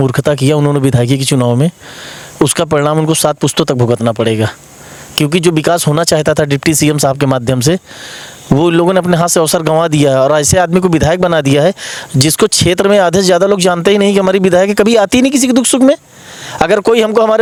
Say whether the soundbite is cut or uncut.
uncut